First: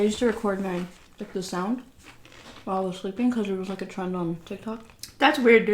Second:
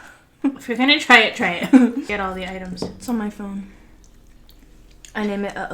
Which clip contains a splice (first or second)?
second